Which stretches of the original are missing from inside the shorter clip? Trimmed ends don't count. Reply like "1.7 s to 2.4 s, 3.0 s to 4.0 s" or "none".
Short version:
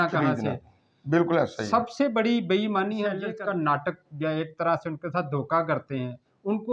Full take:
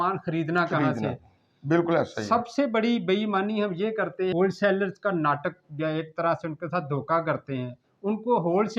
3.9 s to 4.9 s